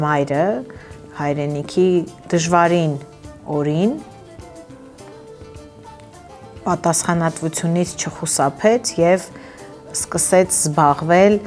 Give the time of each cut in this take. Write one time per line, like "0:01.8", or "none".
none